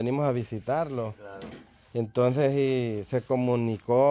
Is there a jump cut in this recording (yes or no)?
no